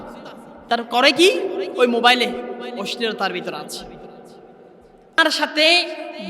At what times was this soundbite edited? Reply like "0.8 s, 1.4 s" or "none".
5.2 s